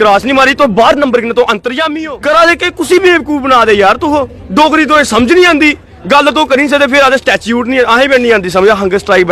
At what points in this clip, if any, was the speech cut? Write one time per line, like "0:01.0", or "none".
0:01.8